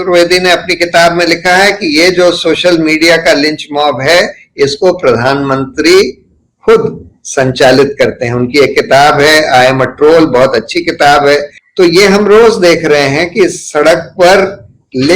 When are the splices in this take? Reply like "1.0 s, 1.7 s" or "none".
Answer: 11.6 s